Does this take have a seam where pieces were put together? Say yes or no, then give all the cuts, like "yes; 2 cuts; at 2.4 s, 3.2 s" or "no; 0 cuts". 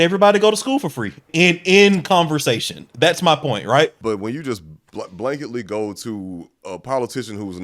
yes; 2 cuts; at 1.3 s, 4.0 s